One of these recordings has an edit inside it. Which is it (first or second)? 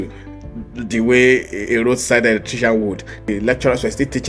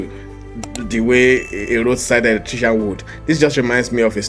first